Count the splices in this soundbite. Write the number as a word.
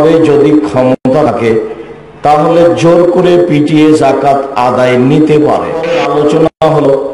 one